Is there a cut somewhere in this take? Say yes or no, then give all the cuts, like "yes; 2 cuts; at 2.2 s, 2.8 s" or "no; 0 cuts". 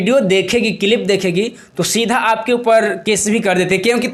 no; 0 cuts